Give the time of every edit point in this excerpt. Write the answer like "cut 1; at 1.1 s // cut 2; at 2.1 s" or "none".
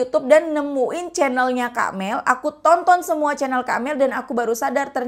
none